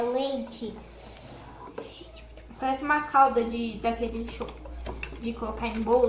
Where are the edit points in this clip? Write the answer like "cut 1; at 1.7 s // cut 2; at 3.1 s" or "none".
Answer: none